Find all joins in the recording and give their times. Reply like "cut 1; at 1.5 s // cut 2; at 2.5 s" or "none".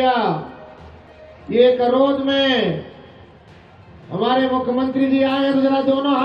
none